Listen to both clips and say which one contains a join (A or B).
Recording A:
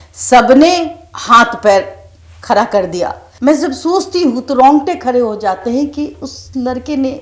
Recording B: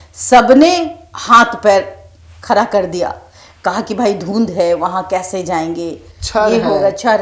A